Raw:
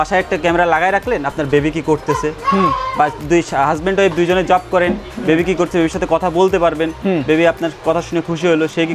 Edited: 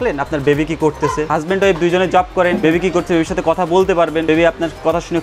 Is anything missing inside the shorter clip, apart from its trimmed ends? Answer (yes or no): yes